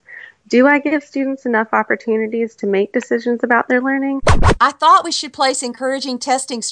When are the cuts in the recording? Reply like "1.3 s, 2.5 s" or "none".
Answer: 4.4 s